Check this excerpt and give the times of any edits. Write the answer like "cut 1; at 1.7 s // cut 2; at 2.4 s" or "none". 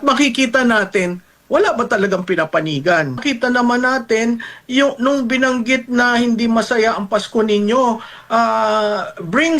cut 1; at 3.2 s